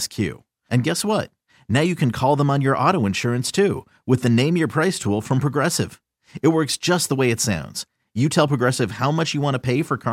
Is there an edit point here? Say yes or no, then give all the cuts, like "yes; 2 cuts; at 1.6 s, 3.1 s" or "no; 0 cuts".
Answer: no; 0 cuts